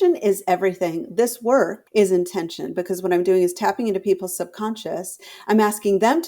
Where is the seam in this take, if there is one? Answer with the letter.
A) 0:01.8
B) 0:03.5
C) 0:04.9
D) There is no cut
A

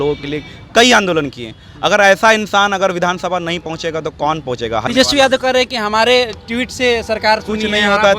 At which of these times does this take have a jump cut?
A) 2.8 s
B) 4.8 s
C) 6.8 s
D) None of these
B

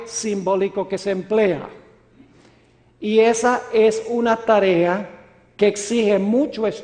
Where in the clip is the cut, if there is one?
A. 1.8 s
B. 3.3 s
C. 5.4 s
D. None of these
B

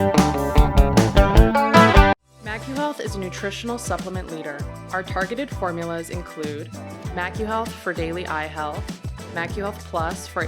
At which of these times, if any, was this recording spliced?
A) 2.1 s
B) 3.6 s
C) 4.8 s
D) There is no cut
A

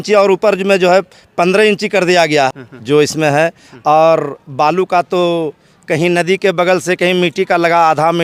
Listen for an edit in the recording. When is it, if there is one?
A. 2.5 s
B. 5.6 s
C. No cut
A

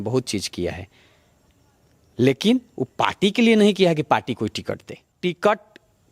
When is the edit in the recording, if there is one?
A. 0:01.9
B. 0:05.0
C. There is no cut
B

